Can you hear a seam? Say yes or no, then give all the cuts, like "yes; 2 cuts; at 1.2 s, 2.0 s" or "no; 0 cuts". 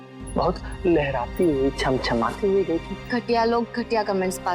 yes; 1 cut; at 3.0 s